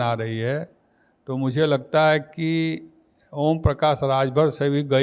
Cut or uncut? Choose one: uncut